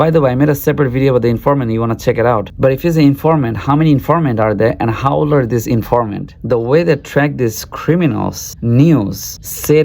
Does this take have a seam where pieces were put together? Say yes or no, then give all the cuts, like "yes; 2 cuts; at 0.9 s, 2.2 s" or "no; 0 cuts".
yes; 1 cut; at 6.3 s